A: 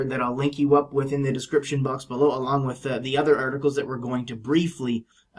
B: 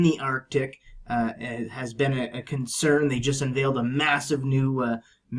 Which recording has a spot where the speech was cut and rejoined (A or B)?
A